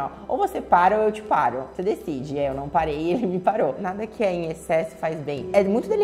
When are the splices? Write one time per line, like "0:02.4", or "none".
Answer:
0:03.8